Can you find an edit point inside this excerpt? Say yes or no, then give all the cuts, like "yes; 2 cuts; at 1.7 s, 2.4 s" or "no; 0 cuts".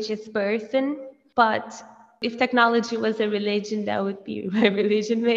yes; 2 cuts; at 1.1 s, 2.2 s